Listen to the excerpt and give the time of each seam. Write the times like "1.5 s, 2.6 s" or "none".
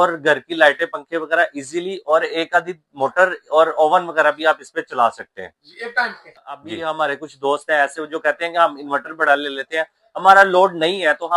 6.7 s